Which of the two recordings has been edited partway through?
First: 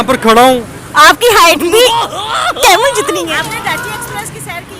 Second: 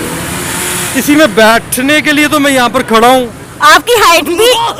first; 1 cut; at 3.4 s

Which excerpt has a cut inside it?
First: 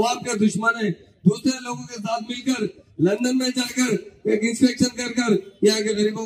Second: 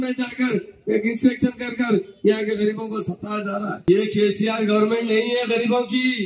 second; 1 cut; at 3.8 s

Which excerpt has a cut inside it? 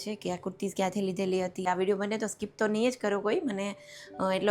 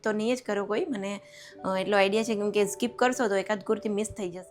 first; 1 cut; at 1.6 s

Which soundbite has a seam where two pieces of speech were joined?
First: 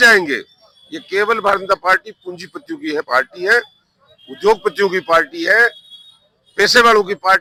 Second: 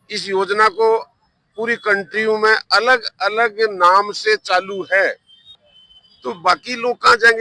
second; 1 cut; at 5.7 s

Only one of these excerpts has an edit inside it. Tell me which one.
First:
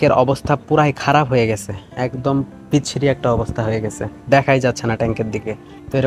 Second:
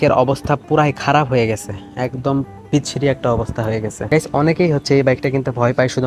second; 1 cut; at 4.0 s

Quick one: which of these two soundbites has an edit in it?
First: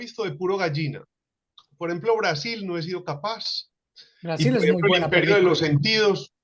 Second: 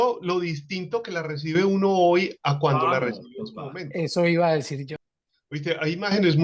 second; 1 cut; at 4.8 s

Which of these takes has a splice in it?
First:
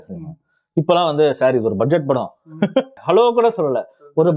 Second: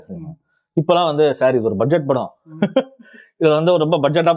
first; 1 cut; at 3.0 s

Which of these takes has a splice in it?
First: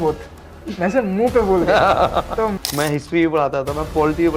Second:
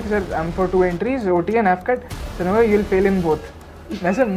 first; 1 cut; at 2.5 s

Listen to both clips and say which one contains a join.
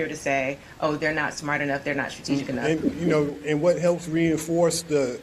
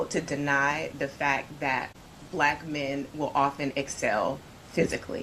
first; 1 cut; at 2.3 s

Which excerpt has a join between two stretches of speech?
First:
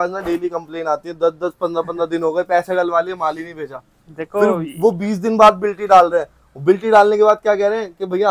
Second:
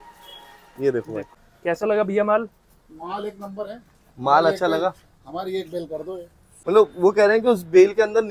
second; 2 cuts; at 1.3 s, 6.5 s

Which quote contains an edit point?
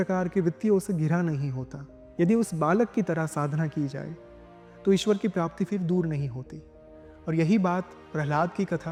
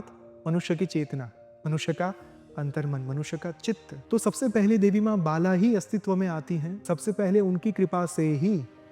second; 2 cuts; at 3.9 s, 6.7 s

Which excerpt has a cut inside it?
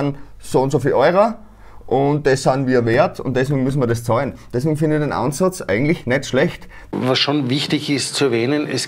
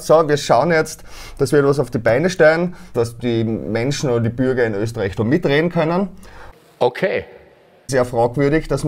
second; 3 cuts; at 2.9 s, 6.5 s, 7.8 s

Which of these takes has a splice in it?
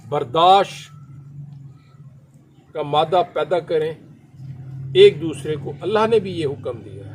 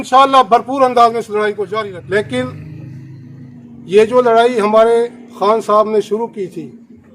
second; 1 cut; at 1.7 s

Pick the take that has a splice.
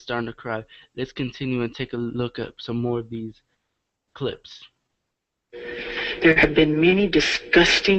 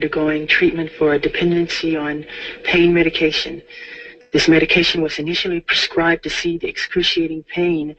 first; 1 cut; at 1.9 s

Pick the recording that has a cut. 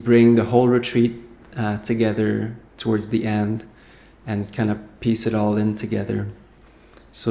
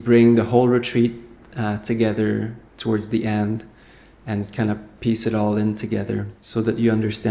second; 1 cut; at 6.4 s

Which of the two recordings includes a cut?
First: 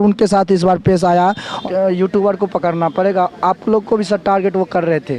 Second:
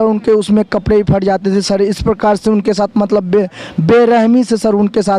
first; 1 cut; at 1.6 s

